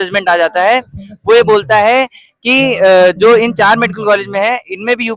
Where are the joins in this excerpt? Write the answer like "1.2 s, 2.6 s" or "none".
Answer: none